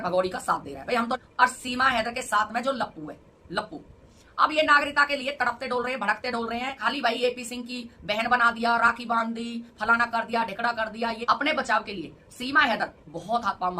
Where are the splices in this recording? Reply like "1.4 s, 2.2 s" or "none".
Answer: 1.2 s, 4.1 s, 6.8 s, 11.2 s